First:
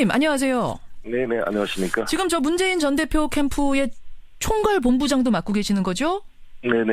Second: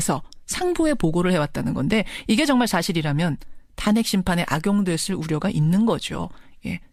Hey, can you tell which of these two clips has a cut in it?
first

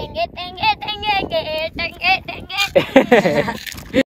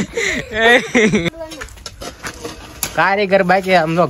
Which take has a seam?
second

